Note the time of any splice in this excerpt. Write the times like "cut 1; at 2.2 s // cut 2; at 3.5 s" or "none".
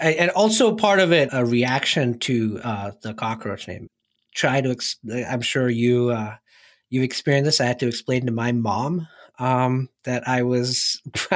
cut 1; at 1.3 s // cut 2; at 4.1 s